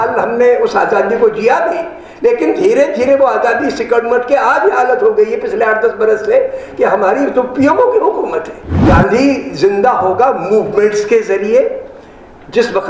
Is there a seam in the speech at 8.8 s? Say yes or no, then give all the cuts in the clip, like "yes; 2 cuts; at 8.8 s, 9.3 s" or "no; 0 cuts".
yes; 1 cut; at 8.8 s